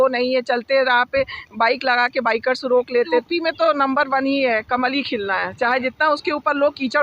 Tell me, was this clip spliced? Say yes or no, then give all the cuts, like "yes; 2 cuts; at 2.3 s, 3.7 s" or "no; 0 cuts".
yes; 1 cut; at 3.2 s